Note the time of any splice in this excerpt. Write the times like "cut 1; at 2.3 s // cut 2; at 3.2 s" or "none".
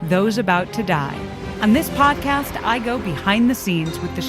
cut 1; at 1.4 s